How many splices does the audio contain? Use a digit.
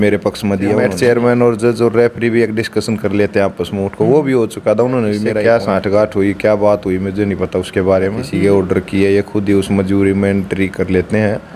3